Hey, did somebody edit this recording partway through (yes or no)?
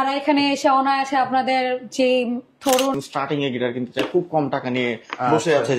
yes